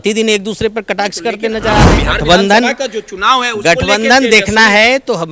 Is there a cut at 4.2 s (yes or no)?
no